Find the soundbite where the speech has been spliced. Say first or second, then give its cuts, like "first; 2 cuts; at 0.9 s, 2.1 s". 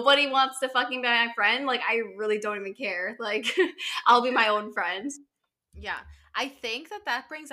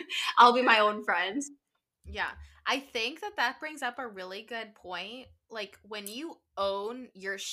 first; 1 cut; at 1.2 s